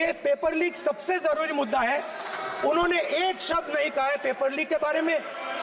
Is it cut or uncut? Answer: uncut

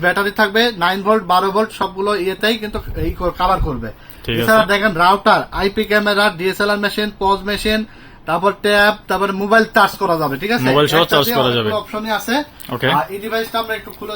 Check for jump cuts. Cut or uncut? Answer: uncut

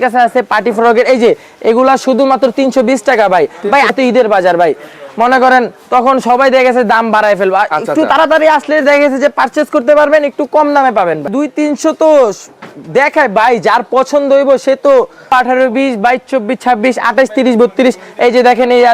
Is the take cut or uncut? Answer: cut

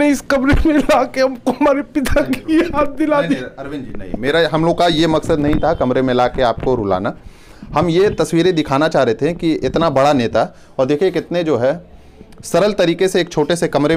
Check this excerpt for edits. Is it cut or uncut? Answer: uncut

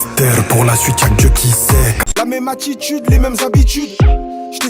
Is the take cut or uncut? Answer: cut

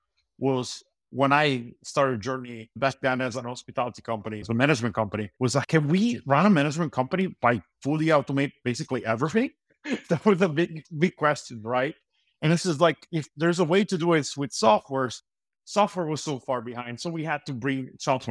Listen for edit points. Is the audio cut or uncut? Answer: cut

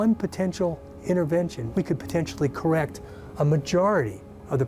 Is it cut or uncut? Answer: cut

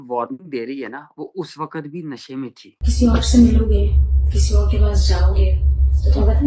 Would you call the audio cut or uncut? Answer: cut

